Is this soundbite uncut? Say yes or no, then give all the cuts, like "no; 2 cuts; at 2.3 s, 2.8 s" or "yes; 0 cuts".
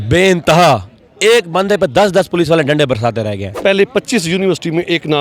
no; 1 cut; at 3.5 s